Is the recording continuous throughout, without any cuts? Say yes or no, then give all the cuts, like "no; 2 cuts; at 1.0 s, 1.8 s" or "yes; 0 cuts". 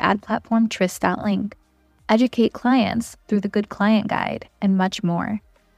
yes; 0 cuts